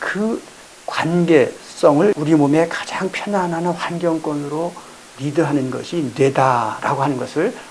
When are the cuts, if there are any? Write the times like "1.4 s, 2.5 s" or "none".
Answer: none